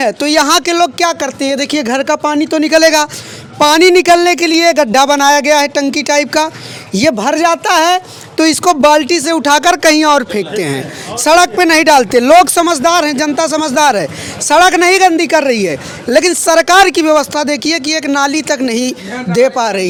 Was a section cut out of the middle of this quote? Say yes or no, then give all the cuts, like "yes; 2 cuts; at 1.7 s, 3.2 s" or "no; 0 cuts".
no; 0 cuts